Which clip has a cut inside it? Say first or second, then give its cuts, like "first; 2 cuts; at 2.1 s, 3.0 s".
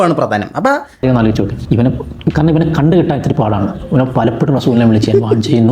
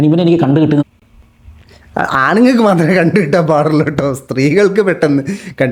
first; 1 cut; at 1.0 s